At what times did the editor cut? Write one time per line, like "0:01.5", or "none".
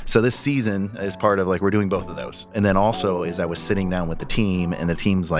0:02.5